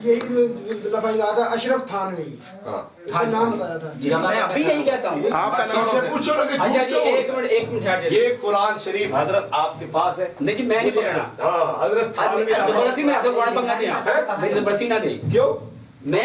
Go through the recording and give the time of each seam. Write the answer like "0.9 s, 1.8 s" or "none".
5.5 s